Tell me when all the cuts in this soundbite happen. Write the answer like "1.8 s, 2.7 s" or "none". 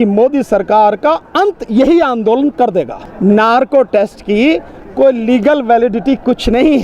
2.9 s